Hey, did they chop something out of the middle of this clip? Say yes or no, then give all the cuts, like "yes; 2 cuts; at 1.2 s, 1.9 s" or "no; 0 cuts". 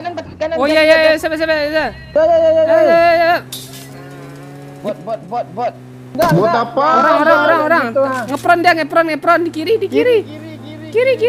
no; 0 cuts